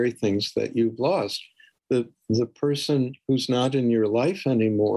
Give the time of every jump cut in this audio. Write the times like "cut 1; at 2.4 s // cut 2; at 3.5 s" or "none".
none